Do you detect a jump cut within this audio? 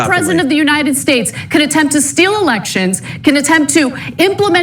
yes; 1 cut; at 3.4 s

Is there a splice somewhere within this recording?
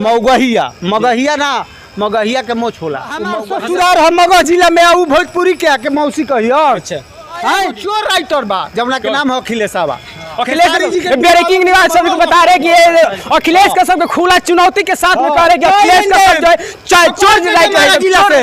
yes; 2 cuts; at 3.4 s, 7.8 s

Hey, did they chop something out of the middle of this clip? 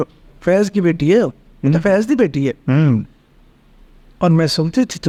no; 0 cuts

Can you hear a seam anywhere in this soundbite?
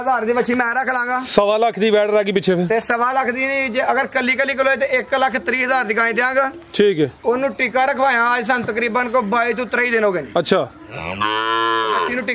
no; 0 cuts

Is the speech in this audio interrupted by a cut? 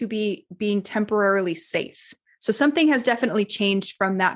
yes; 1 cut; at 2.1 s

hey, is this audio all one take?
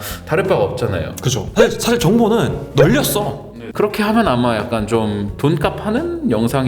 no; 2 cuts; at 1.4 s, 3.4 s

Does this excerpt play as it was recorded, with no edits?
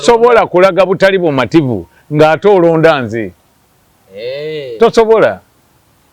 yes; 0 cuts

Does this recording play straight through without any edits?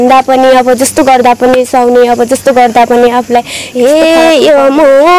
no; 1 cut; at 3.6 s

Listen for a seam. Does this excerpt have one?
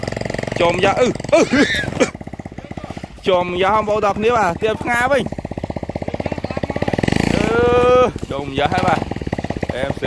yes; 1 cut; at 2.0 s

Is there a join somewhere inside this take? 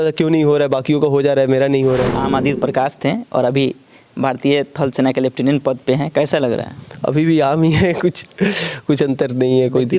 yes; 1 cut; at 2.2 s

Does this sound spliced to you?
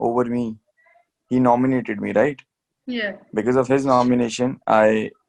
no; 0 cuts

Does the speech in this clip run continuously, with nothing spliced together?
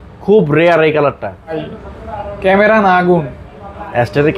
no; 1 cut; at 1.6 s

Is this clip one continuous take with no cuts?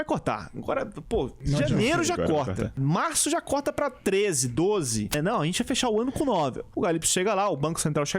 no; 4 cuts; at 1.4 s, 2.8 s, 5.1 s, 6.6 s

